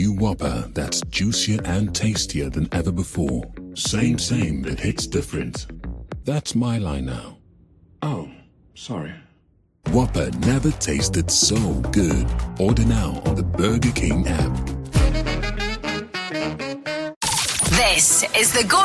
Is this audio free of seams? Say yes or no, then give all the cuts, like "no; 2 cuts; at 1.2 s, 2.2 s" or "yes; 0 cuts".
no; 1 cut; at 17.2 s